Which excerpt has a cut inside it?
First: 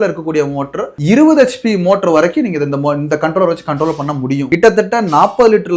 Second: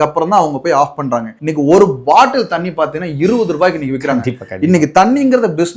first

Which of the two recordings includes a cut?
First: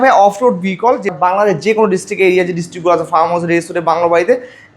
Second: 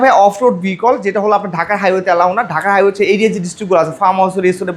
first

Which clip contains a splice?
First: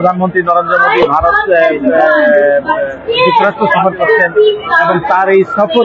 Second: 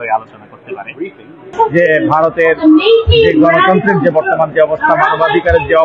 second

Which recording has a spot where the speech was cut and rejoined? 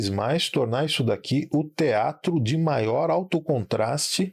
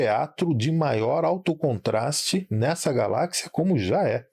second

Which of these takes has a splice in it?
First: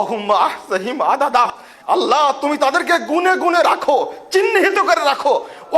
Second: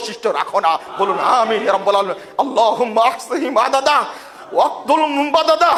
first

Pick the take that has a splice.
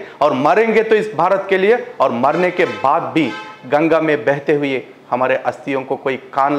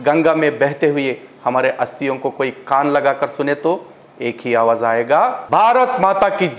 second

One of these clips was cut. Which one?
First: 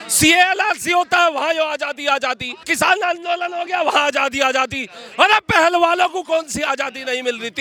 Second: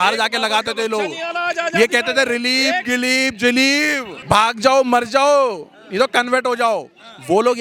second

